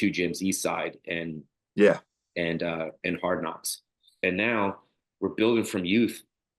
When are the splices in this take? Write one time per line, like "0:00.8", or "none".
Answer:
0:04.1